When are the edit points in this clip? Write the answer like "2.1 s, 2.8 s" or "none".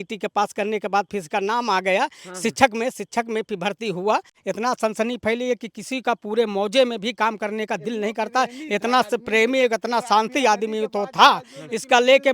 4.3 s

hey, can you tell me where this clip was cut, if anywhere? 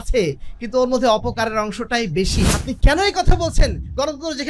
2.6 s

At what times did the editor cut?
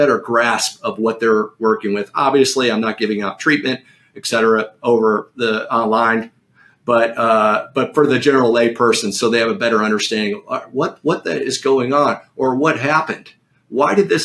none

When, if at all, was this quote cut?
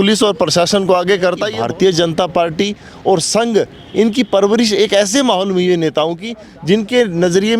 1.5 s

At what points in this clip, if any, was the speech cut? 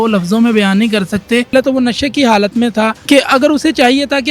1.5 s, 3.0 s

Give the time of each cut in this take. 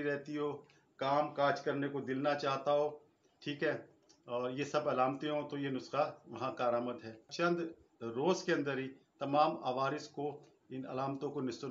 7.3 s

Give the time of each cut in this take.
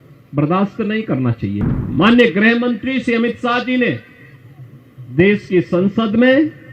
1.6 s

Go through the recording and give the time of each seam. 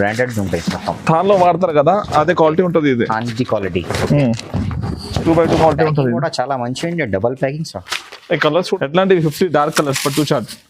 8.8 s

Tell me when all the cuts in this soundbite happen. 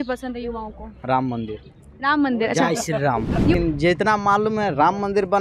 3.5 s

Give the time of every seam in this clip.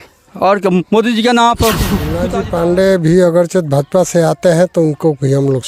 2.2 s

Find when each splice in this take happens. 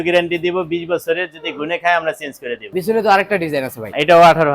none

